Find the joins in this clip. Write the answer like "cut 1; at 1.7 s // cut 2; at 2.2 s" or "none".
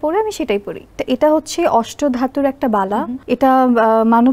cut 1; at 1.0 s // cut 2; at 3.2 s